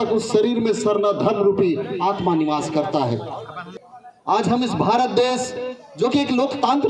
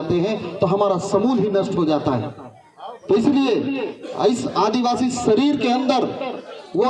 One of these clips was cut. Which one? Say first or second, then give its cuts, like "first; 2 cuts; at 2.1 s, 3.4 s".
first; 1 cut; at 3.6 s